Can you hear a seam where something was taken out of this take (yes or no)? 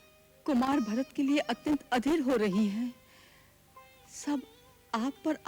no